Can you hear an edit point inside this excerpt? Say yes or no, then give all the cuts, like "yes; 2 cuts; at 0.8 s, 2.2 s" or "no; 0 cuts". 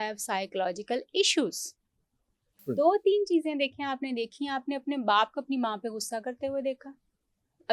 yes; 1 cut; at 2.7 s